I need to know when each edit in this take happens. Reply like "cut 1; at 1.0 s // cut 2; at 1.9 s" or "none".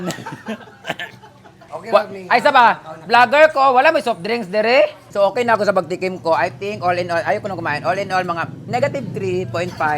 cut 1; at 1.6 s // cut 2; at 5.0 s